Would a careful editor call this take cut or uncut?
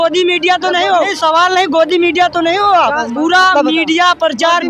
cut